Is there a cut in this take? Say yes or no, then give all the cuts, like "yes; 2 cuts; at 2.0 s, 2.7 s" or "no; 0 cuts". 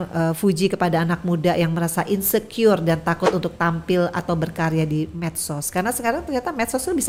no; 0 cuts